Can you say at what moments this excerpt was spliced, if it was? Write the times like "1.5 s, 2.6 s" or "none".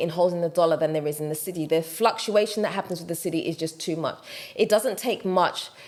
none